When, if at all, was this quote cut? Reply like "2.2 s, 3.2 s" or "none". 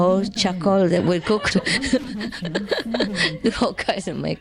none